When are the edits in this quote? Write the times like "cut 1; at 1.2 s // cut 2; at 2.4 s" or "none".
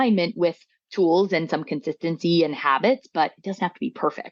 none